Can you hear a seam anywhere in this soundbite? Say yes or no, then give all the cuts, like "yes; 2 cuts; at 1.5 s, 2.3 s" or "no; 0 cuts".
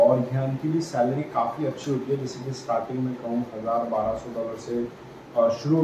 no; 0 cuts